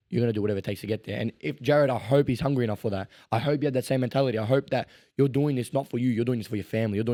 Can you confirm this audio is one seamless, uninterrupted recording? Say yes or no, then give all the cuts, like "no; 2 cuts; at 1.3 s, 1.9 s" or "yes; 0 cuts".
yes; 0 cuts